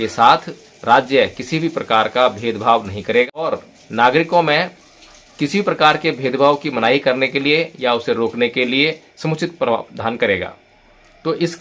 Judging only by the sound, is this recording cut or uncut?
cut